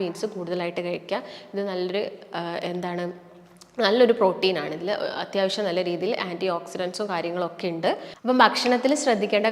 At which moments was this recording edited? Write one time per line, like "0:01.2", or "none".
0:08.1

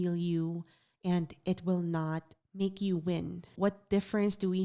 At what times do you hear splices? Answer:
0:03.5

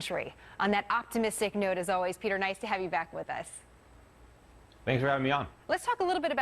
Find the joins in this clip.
0:01.2

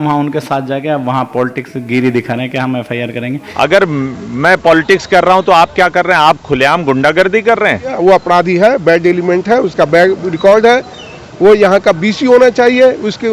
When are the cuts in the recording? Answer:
0:03.4
0:07.9

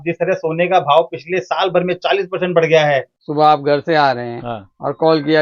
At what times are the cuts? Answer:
0:03.2

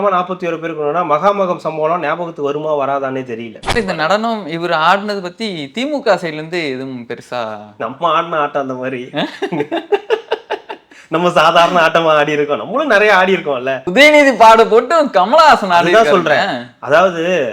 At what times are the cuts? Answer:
0:03.6
0:13.8

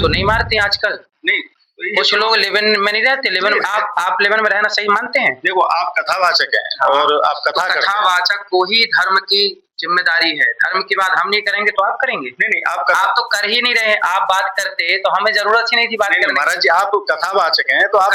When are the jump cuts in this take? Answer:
none

